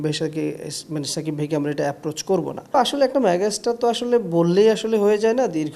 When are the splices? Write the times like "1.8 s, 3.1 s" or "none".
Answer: 2.7 s